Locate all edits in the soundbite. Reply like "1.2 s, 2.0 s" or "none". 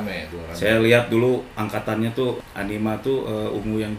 2.4 s